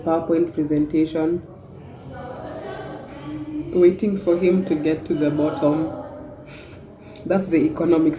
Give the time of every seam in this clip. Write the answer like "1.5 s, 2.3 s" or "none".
none